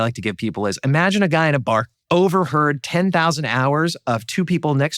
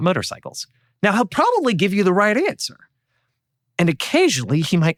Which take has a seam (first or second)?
first